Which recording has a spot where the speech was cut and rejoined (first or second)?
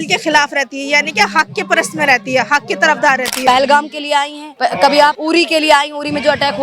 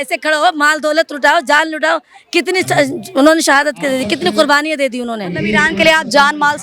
first